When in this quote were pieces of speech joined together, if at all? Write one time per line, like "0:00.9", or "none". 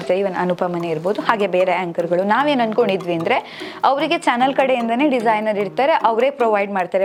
none